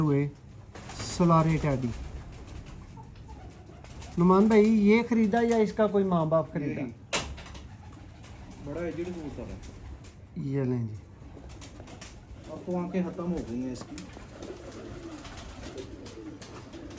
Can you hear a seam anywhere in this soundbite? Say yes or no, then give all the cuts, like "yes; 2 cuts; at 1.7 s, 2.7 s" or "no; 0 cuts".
no; 0 cuts